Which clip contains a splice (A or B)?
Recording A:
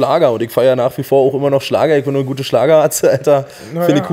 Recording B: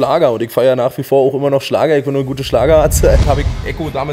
B